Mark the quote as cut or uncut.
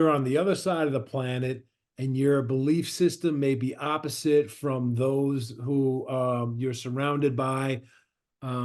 uncut